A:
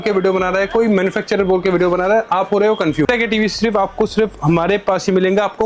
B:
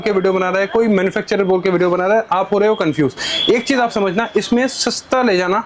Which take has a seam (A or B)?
A